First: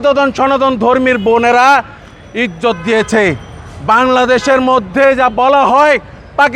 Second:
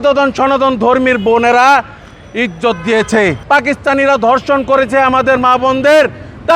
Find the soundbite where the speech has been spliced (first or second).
second